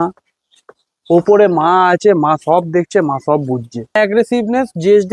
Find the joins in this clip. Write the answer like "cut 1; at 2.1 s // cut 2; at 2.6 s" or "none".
cut 1; at 4.0 s